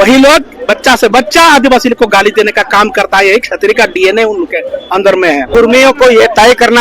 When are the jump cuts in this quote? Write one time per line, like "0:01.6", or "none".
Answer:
0:05.5